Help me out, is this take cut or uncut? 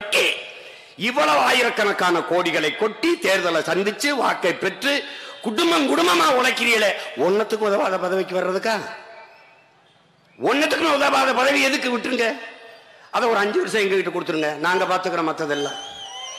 uncut